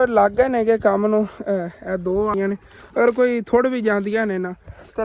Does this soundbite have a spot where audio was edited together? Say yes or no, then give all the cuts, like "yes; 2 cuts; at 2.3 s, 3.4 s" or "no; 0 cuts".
yes; 1 cut; at 2.3 s